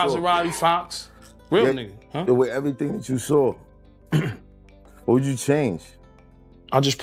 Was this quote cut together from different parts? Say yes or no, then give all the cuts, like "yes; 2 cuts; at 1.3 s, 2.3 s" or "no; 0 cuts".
no; 0 cuts